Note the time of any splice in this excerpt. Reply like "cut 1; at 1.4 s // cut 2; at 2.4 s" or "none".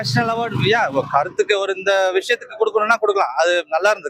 none